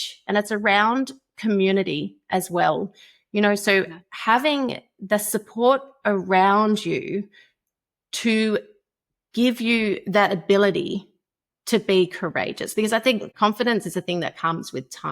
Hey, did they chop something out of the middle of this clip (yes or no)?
yes